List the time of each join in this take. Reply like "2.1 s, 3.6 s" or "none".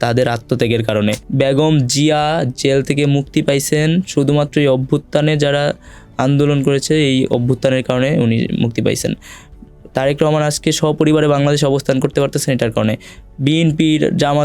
none